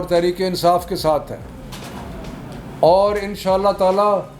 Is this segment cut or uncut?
uncut